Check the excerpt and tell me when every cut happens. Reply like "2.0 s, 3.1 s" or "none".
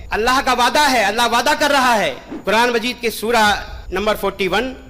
2.3 s

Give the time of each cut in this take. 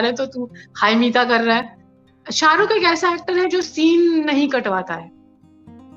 1.8 s

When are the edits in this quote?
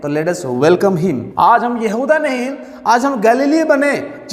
1.3 s

